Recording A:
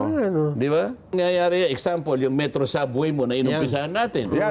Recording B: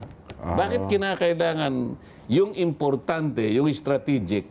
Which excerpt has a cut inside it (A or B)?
A